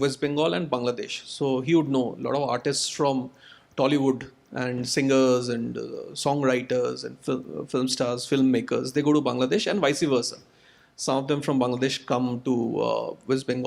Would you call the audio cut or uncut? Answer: uncut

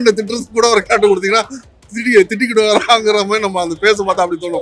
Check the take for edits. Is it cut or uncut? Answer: uncut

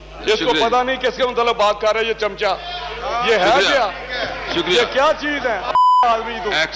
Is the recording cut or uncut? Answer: uncut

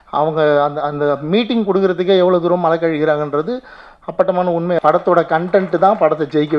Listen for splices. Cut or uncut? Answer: cut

